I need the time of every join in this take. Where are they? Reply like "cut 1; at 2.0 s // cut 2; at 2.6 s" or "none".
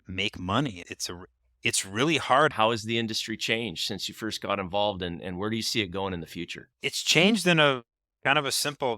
cut 1; at 2.5 s // cut 2; at 6.6 s